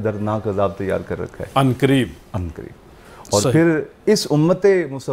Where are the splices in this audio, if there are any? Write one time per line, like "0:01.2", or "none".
none